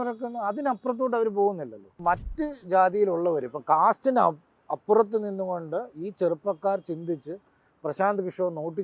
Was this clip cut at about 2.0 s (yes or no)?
yes